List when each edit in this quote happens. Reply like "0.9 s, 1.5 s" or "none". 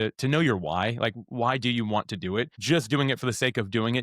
2.6 s

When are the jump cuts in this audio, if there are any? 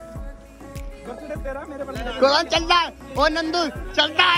none

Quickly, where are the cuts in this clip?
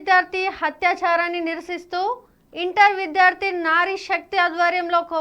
none

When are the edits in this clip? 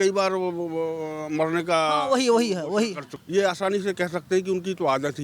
3.1 s

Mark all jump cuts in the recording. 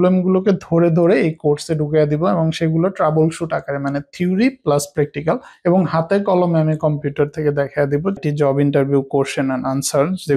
5.5 s, 8.2 s

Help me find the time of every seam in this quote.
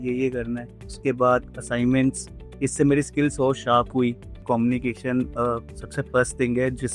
4.4 s

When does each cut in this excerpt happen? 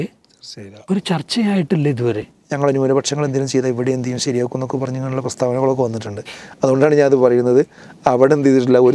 2.4 s

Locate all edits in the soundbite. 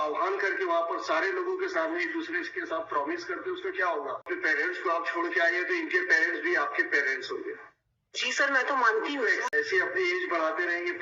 4.2 s, 9.5 s

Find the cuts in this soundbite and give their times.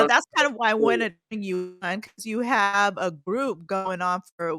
none

